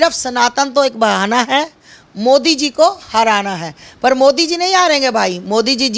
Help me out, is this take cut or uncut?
uncut